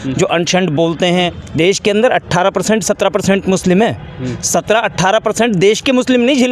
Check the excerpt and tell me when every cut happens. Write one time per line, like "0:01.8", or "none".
0:01.4